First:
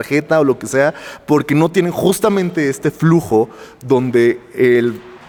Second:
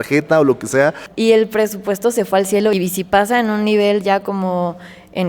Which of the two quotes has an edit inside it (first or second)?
second